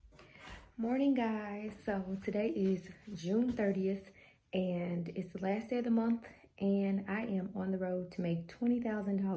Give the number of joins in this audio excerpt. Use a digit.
0